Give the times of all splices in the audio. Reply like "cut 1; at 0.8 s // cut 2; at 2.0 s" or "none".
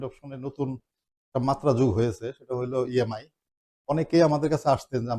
none